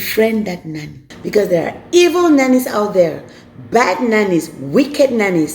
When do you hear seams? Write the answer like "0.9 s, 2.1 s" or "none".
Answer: 1.0 s